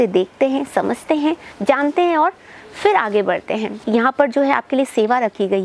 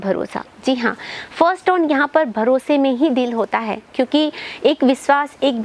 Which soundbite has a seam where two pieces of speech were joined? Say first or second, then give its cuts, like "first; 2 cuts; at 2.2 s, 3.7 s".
first; 1 cut; at 3.7 s